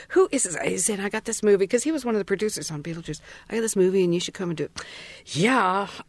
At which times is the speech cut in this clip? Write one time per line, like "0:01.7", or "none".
none